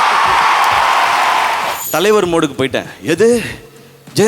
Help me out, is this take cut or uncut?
cut